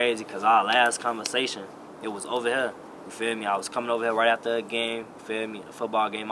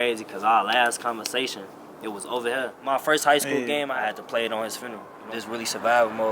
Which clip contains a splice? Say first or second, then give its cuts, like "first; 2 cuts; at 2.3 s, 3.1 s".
second; 3 cuts; at 2.8 s, 3.9 s, 5.2 s